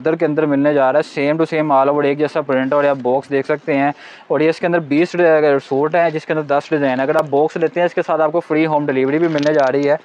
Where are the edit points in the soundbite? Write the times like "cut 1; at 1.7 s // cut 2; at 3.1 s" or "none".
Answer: none